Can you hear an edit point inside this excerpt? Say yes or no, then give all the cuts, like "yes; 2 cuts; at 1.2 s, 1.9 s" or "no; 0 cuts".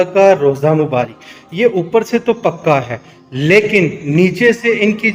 no; 0 cuts